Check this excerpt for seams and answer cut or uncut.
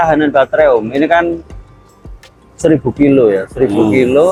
uncut